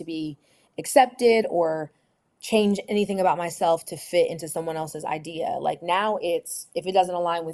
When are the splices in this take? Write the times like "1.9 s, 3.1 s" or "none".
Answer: none